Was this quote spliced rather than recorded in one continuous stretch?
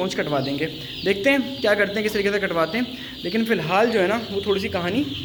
no; 0 cuts

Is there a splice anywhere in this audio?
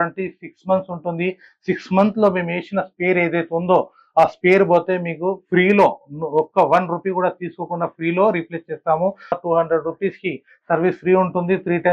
yes; 1 cut; at 9.4 s

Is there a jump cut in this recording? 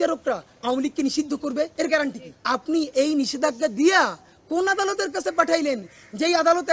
yes; 2 cuts; at 1.7 s, 2.3 s

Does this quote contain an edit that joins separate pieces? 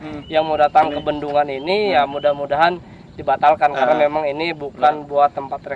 no; 0 cuts

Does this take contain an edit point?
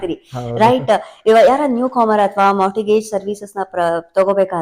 no; 0 cuts

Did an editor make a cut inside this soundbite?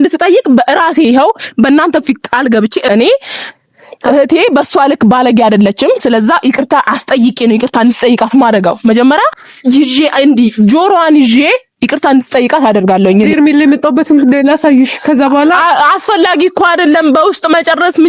yes; 3 cuts; at 2.9 s, 9.4 s, 13.3 s

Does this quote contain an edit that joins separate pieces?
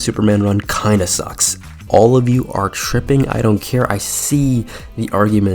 yes; 1 cut; at 1.8 s

